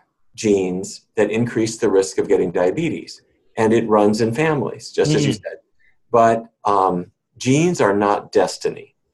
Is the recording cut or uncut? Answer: uncut